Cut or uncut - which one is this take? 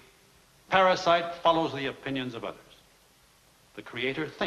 uncut